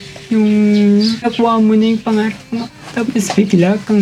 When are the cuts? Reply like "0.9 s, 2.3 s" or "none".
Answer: 1.2 s

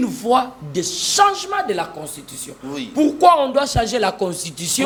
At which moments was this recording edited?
none

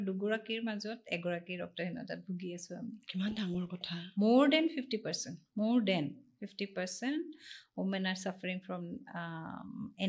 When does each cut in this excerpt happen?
none

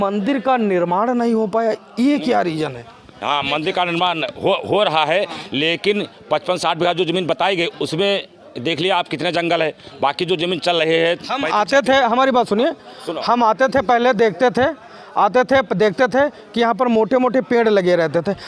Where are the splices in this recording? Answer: none

